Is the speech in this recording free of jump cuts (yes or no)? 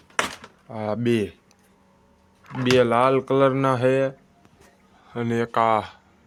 yes